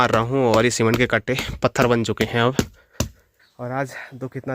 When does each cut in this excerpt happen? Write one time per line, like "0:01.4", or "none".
0:03.2